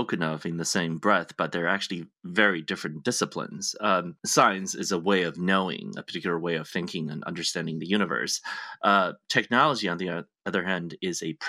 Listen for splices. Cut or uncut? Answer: cut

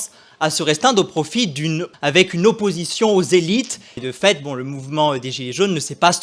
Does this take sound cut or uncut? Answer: cut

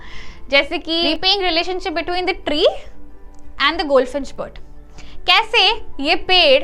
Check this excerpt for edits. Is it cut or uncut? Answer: cut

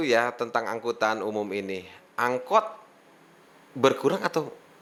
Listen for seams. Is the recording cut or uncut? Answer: uncut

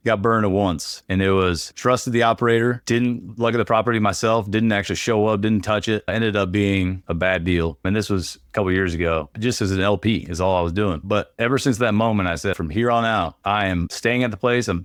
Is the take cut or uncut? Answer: uncut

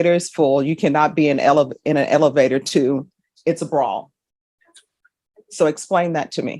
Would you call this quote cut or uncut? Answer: uncut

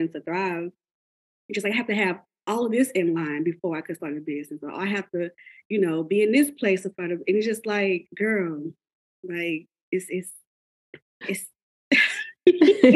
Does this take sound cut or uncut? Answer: uncut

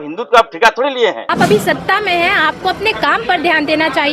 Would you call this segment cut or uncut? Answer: cut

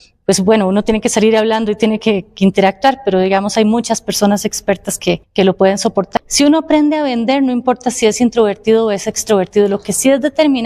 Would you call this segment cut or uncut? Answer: cut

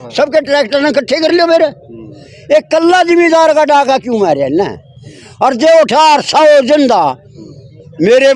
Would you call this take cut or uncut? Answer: uncut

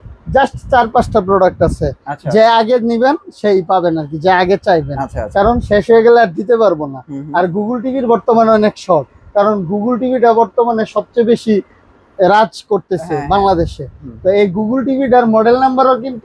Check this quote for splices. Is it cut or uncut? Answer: uncut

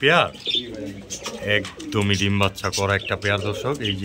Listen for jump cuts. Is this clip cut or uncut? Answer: uncut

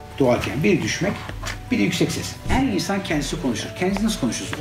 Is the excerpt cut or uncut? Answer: cut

